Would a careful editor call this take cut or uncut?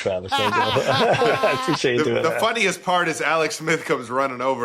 uncut